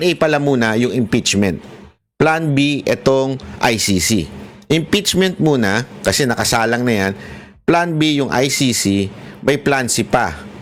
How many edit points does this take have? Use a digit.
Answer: 0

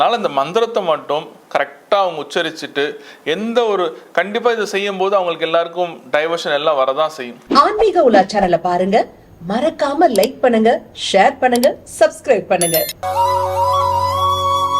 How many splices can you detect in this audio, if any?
1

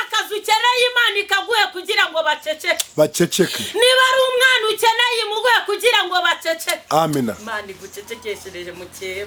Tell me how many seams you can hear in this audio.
0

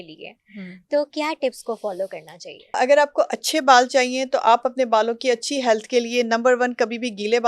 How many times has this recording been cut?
1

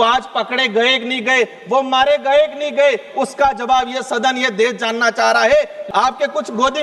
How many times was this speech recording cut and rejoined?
1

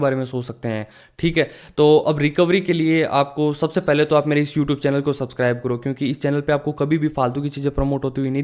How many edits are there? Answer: 0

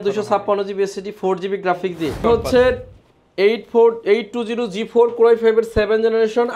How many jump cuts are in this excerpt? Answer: 1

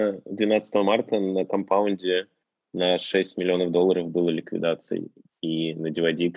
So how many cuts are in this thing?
0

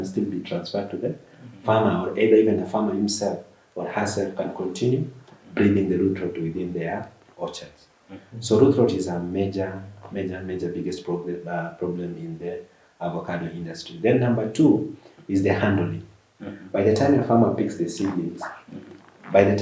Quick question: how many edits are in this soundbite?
0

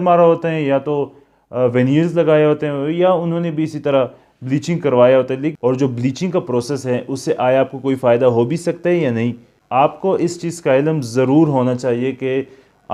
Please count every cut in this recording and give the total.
2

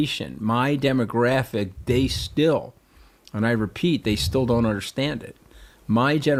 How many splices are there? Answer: 0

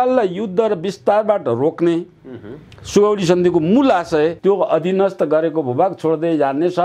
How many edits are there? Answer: 1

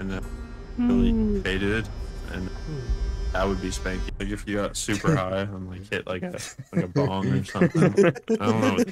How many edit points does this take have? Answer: 1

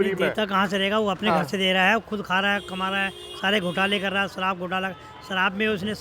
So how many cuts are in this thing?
0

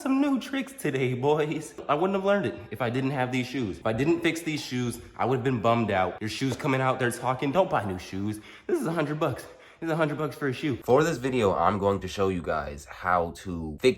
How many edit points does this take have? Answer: 2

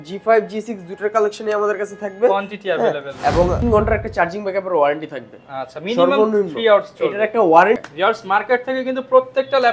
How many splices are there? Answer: 2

